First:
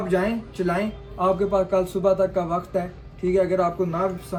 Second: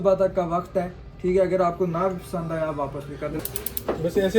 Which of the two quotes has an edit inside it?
second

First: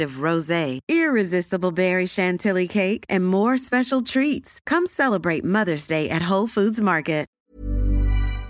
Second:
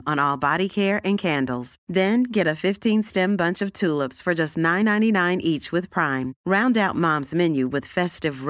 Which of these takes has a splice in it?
first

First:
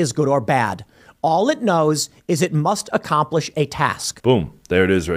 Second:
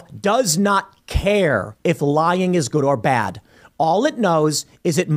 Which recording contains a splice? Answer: first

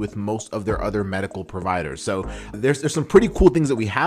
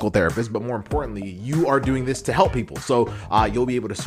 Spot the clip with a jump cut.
first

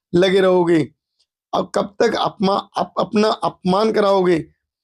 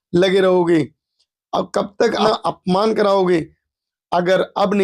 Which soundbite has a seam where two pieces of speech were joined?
second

